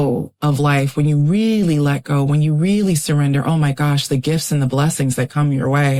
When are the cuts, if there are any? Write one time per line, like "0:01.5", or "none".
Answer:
none